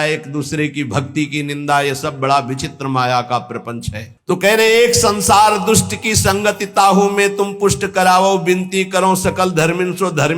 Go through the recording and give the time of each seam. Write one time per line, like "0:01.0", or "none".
none